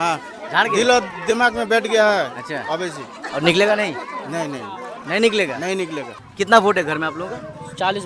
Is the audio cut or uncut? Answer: cut